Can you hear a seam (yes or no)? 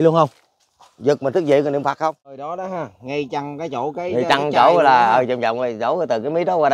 yes